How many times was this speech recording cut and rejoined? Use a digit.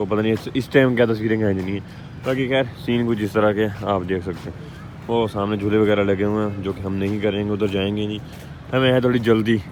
0